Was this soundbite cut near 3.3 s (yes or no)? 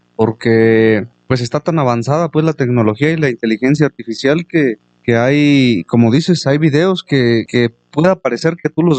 no